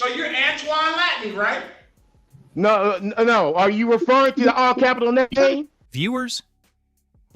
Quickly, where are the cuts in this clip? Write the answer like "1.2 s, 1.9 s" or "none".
5.8 s